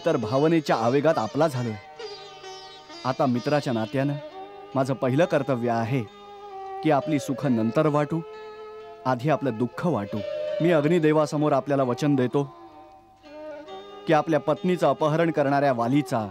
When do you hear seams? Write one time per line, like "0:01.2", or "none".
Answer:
0:10.4